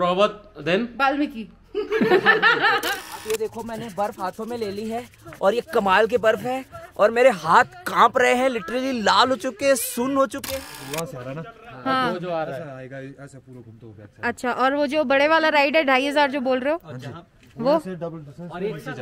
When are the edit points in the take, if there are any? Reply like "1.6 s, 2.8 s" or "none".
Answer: 2.9 s, 10.4 s